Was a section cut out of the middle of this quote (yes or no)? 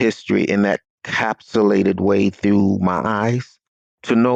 no